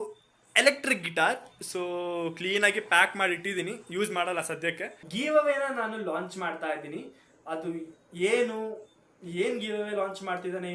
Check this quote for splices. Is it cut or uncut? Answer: cut